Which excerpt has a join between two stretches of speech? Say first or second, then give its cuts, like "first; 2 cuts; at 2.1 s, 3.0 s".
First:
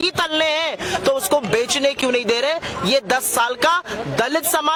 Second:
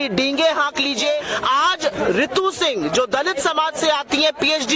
second; 1 cut; at 1.3 s